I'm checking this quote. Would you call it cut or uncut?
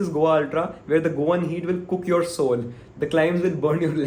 uncut